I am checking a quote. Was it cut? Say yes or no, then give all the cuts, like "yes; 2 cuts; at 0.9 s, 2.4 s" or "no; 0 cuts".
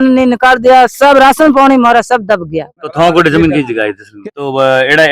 yes; 2 cuts; at 2.9 s, 4.2 s